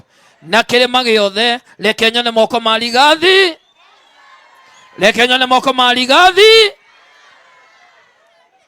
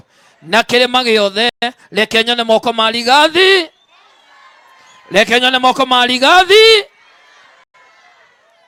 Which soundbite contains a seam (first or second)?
first